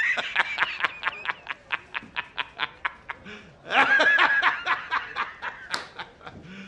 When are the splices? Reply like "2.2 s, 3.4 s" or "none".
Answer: 3.2 s